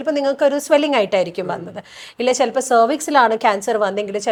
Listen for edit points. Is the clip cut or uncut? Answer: uncut